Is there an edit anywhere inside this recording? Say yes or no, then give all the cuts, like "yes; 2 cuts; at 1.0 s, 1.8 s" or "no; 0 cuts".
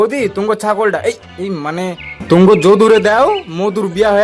no; 0 cuts